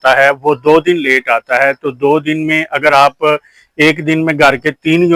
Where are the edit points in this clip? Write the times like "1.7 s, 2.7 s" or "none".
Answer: none